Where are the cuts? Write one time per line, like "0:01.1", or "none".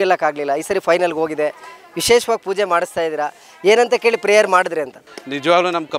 0:05.0

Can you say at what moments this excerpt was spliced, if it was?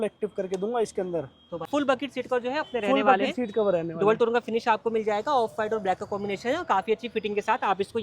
0:01.7

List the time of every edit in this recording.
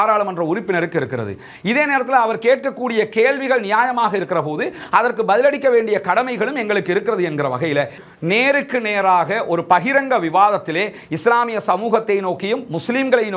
0:08.0

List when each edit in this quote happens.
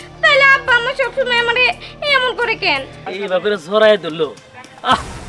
0:03.0

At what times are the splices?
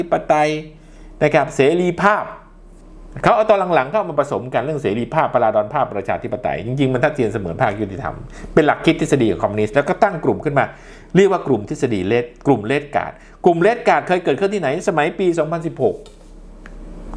none

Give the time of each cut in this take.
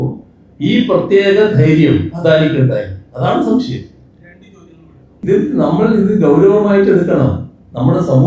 0:05.2

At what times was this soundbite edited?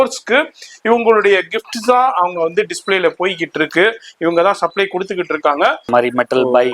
0:05.8

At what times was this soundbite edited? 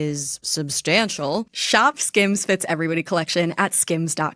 0:01.5

